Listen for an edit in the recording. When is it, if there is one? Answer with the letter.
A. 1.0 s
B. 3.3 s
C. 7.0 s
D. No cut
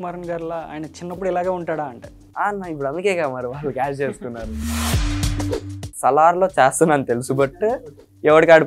A